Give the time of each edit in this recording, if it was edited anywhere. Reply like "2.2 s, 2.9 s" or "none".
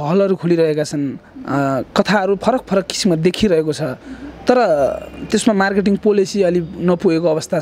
none